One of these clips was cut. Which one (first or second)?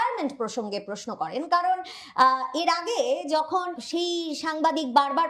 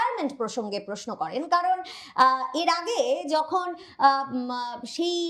first